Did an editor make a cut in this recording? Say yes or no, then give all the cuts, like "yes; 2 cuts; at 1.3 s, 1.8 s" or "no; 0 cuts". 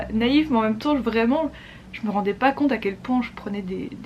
no; 0 cuts